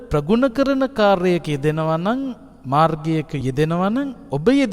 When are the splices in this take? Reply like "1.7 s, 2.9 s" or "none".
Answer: 3.3 s